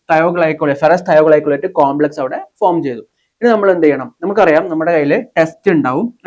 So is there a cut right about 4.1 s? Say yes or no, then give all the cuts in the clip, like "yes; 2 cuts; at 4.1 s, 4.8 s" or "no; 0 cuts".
no; 0 cuts